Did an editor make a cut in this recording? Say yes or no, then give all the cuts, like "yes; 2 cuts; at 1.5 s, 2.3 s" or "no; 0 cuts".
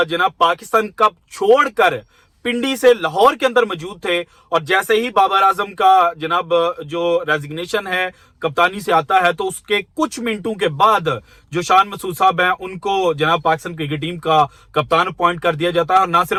no; 0 cuts